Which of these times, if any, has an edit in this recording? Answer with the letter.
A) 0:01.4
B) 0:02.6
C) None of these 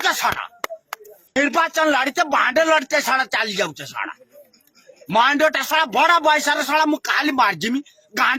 A